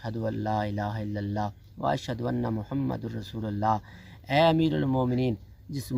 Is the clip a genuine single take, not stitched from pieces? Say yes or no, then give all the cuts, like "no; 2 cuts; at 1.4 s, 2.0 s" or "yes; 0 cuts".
yes; 0 cuts